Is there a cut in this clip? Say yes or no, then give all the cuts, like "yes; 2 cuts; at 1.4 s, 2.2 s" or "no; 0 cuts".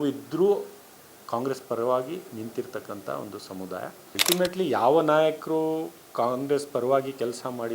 yes; 1 cut; at 4.2 s